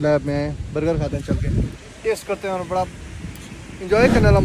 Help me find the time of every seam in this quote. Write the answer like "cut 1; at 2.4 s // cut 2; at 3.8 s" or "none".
none